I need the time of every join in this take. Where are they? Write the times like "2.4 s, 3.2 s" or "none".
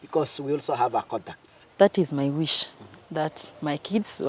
1.7 s